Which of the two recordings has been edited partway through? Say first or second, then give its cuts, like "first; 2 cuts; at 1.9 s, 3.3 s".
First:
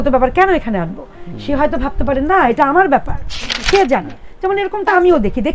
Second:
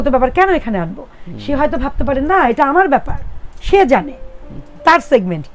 first; 1 cut; at 4.2 s